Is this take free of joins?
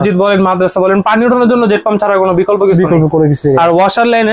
yes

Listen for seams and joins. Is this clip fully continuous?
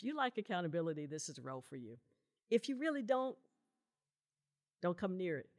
yes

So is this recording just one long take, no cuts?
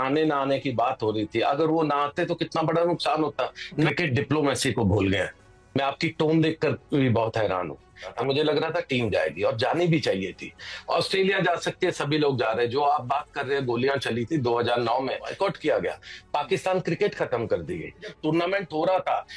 no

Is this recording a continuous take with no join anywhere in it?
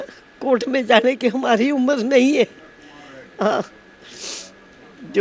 yes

